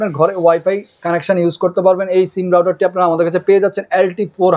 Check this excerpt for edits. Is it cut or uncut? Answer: uncut